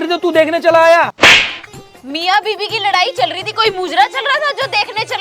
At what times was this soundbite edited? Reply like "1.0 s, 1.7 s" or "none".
1.1 s